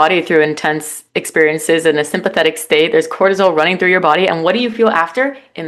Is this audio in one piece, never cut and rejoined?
yes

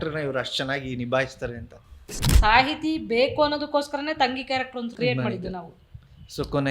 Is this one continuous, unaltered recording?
no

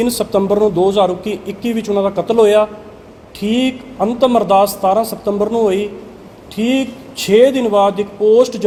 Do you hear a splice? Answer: no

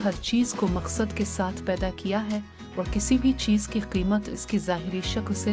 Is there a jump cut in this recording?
no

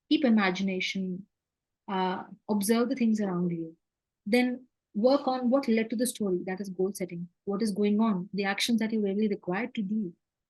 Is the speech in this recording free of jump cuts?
yes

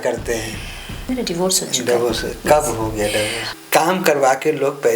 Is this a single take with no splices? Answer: no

